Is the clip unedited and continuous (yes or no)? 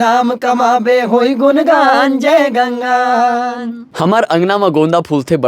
no